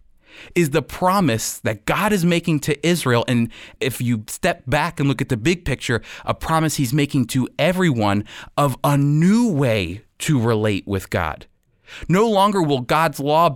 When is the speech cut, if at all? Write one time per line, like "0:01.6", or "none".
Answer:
0:03.8

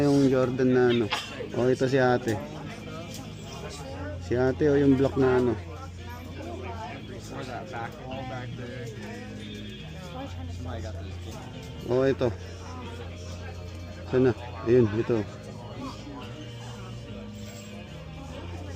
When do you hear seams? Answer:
none

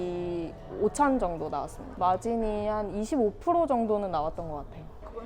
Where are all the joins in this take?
0:01.9

